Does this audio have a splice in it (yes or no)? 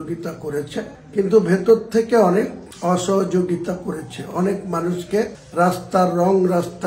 no